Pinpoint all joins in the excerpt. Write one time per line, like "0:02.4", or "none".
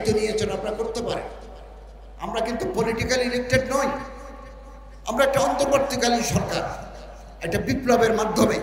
none